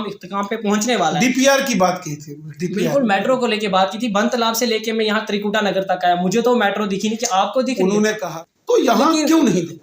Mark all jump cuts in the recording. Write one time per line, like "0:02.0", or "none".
0:08.3